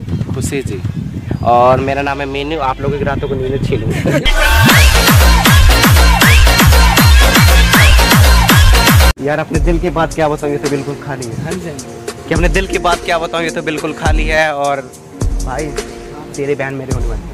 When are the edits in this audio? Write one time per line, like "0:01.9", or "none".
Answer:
0:09.1